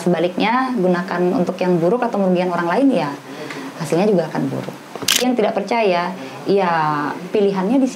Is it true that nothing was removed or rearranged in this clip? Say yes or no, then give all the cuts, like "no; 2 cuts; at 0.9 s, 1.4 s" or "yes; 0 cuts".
no; 1 cut; at 5.2 s